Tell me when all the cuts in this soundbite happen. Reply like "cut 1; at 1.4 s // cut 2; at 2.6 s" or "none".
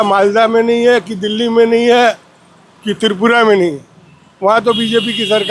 none